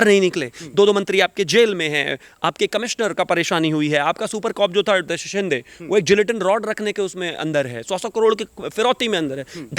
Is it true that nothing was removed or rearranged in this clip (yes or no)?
no